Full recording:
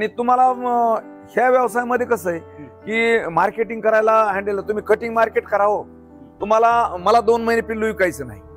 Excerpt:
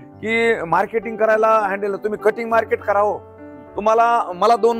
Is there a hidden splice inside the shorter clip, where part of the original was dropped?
no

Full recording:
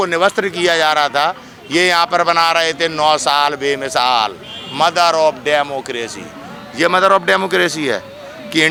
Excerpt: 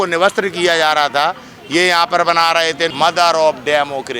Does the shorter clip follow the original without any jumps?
no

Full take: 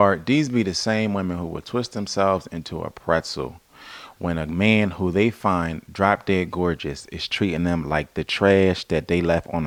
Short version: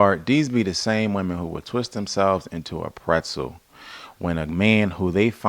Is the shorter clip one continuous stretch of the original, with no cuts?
yes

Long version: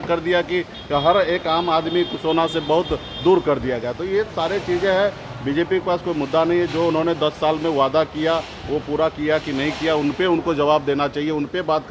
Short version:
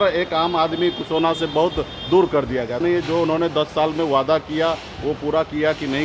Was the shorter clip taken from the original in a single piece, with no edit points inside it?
no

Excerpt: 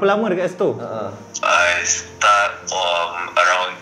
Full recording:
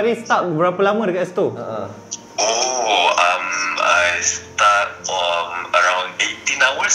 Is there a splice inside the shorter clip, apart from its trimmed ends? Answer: yes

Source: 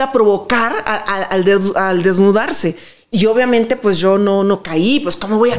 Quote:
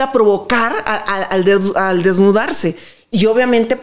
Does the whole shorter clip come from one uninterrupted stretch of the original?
yes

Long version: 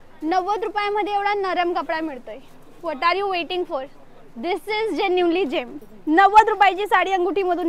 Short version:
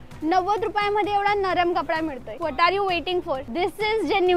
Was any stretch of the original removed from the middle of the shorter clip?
yes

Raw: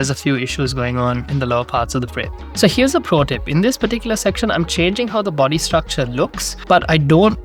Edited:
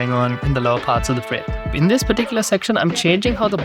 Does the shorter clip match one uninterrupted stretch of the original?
no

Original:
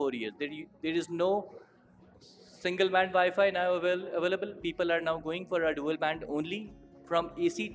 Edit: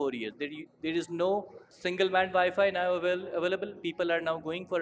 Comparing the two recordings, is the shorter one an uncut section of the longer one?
no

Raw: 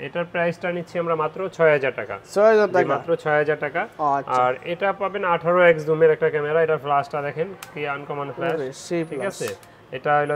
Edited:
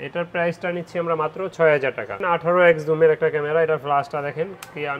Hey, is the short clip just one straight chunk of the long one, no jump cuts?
no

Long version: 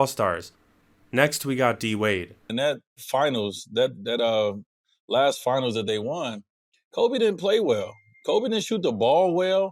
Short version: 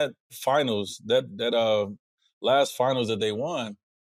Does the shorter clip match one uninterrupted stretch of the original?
yes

